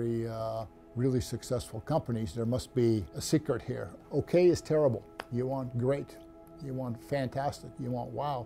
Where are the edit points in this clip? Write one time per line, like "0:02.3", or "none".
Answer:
0:04.0
0:05.2